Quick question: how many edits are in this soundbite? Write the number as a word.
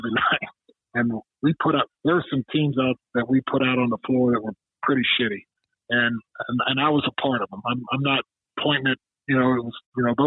two